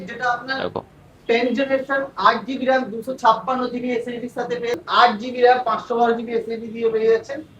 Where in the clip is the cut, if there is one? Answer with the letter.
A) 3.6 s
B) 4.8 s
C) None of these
B